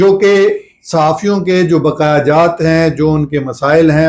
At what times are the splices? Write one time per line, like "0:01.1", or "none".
none